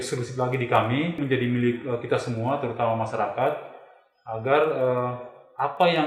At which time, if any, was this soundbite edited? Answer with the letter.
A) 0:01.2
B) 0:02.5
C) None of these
A